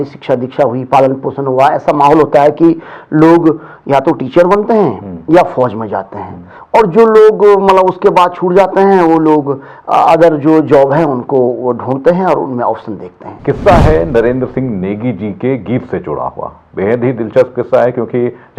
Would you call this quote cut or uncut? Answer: cut